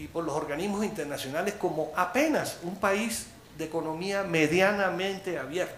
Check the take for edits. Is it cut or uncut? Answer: uncut